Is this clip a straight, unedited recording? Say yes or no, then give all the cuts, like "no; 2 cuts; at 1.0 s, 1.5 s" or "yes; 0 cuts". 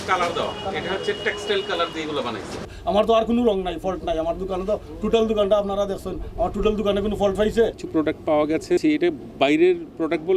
no; 3 cuts; at 2.7 s, 7.8 s, 8.8 s